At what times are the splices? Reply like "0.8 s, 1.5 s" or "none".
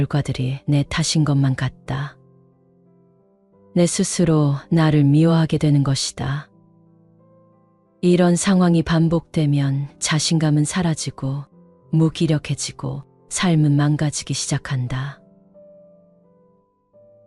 2.1 s, 3.7 s, 6.5 s, 8.0 s